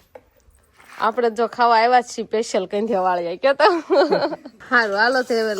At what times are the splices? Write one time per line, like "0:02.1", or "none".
0:04.5